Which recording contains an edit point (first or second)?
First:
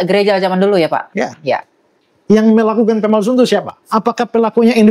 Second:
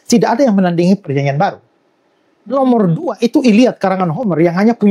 first